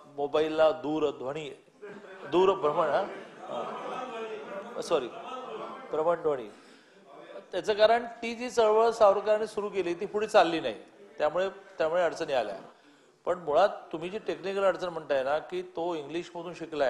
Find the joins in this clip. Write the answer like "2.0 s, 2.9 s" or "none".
none